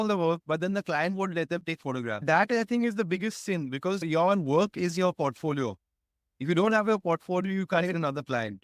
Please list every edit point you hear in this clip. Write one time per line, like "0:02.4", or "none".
0:02.2